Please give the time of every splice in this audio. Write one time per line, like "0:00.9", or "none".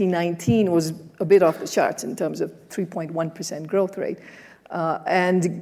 none